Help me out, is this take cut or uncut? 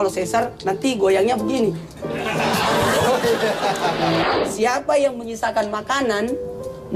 cut